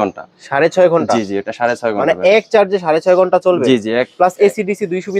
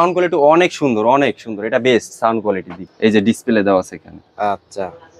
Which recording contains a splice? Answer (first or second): second